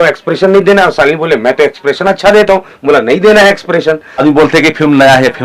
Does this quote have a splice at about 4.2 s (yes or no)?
yes